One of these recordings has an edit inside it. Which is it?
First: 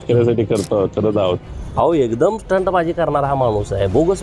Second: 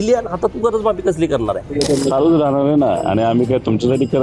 first; 1 cut; at 1.6 s

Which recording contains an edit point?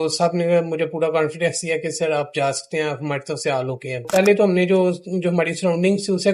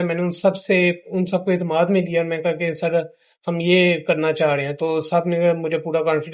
first; 1 cut; at 4.0 s

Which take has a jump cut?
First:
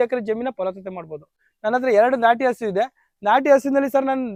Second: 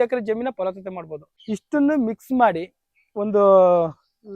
second; 1 cut; at 1.3 s

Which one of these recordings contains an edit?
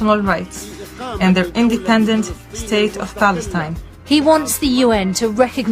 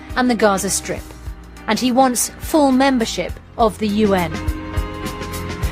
first; 1 cut; at 3.9 s

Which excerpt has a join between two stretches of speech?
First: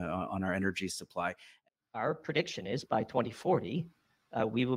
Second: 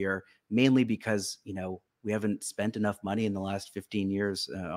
first; 1 cut; at 1.6 s

